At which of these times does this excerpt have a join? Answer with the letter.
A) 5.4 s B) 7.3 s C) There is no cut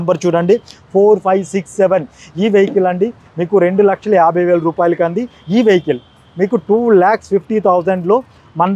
C